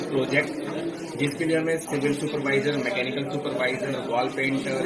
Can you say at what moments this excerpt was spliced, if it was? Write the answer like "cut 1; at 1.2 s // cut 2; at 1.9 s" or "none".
none